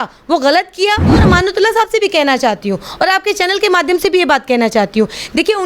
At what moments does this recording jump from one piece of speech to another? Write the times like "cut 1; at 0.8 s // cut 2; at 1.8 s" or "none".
cut 1; at 1.2 s

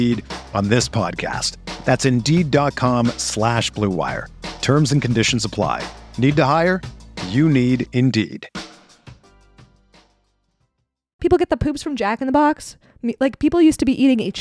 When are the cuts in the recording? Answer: cut 1; at 11.2 s

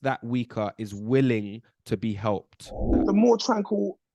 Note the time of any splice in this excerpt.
cut 1; at 3.0 s

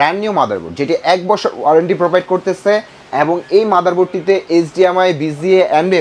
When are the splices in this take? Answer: none

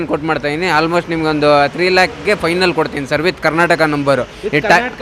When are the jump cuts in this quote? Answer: none

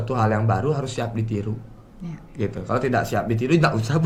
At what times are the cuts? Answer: none

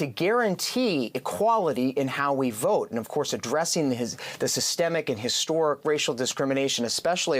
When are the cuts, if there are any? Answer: none

